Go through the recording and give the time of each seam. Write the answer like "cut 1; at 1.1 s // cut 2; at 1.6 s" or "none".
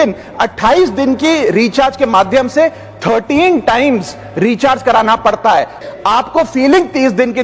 cut 1; at 5.8 s